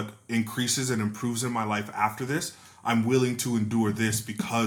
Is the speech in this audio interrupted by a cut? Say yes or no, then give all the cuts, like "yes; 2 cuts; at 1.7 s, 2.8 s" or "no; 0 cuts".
no; 0 cuts